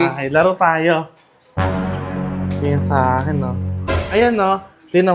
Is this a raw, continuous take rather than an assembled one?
no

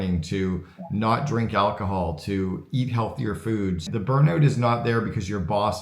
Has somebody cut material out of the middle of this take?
yes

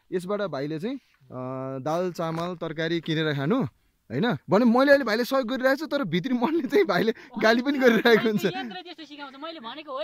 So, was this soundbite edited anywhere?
yes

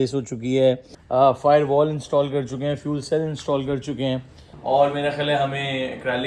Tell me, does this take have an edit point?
yes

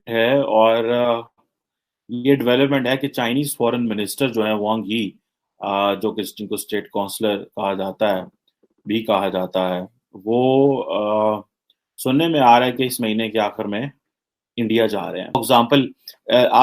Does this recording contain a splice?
yes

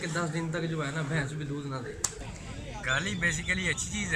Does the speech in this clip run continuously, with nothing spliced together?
no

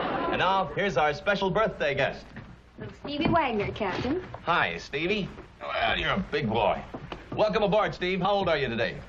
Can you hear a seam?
yes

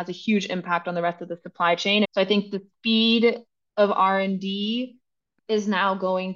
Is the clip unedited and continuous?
no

